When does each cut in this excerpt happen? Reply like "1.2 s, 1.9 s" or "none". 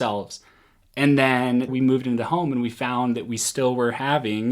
1.7 s